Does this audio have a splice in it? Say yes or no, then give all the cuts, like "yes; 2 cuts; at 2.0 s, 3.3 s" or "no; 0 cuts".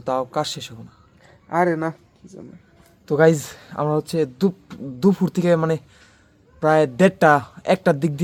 no; 0 cuts